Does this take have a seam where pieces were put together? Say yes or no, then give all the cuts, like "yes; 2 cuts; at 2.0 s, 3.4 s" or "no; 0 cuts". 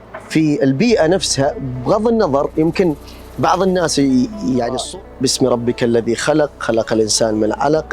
yes; 1 cut; at 4.8 s